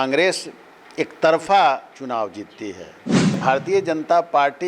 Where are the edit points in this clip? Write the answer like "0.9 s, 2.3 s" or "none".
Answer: 3.4 s